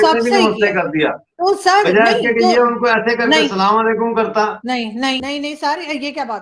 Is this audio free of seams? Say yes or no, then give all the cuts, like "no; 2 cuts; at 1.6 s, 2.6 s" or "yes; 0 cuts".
yes; 0 cuts